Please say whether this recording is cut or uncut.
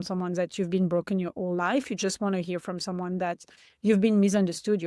uncut